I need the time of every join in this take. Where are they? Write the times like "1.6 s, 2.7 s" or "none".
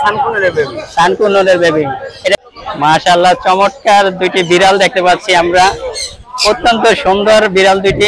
2.3 s